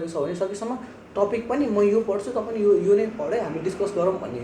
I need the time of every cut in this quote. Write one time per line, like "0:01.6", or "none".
none